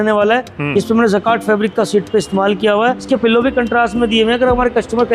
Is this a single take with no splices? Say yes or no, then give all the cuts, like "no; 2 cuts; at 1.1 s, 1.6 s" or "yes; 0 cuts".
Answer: no; 1 cut; at 3.0 s